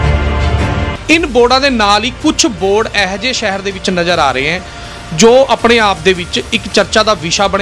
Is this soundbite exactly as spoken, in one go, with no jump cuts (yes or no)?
no